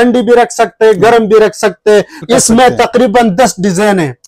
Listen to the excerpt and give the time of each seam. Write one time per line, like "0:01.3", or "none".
0:02.2